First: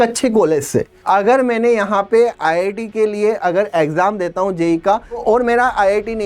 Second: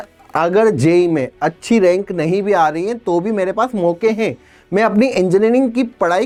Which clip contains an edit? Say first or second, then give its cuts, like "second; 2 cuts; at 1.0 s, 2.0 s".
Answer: first; 2 cuts; at 0.9 s, 5.2 s